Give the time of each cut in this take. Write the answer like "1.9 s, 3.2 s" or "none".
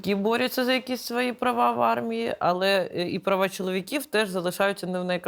none